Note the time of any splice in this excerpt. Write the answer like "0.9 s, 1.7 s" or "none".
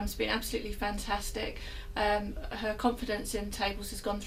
none